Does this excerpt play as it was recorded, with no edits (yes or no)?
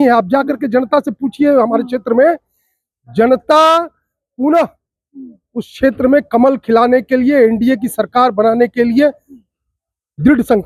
yes